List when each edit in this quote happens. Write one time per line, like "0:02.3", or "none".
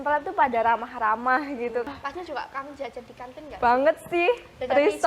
0:01.9